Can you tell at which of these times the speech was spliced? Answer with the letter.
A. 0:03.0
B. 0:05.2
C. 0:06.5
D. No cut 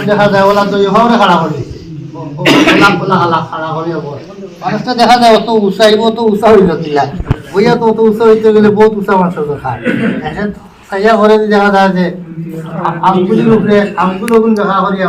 D